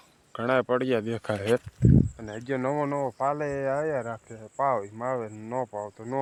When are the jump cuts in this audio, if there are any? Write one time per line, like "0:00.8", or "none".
none